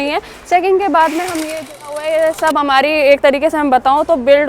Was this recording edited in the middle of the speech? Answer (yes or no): yes